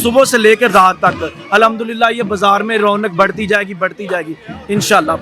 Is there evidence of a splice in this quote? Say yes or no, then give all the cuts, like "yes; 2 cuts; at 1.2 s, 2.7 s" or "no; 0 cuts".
no; 0 cuts